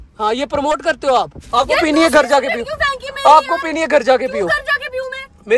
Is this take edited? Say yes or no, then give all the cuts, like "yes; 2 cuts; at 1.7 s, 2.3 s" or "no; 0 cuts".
yes; 1 cut; at 1.4 s